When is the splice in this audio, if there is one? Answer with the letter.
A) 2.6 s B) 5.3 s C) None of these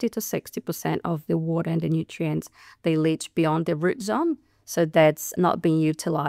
B